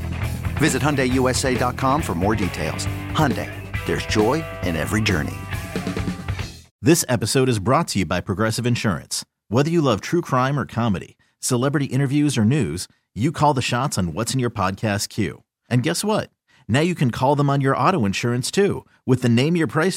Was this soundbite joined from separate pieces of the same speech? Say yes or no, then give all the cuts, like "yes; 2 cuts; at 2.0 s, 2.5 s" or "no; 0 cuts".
yes; 1 cut; at 6.8 s